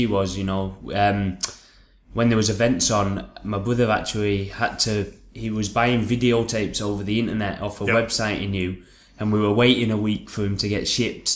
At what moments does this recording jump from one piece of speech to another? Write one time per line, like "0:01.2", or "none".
0:05.9